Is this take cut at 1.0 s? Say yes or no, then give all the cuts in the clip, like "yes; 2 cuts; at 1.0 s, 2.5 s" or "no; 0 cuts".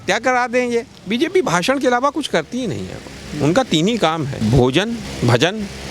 yes; 3 cuts; at 1.0 s, 4.3 s, 5.1 s